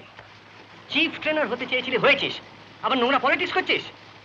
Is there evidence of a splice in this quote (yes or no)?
no